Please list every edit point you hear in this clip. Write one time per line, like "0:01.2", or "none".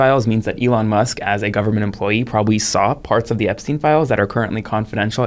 none